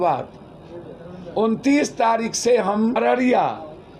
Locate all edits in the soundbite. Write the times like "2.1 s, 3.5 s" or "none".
3.0 s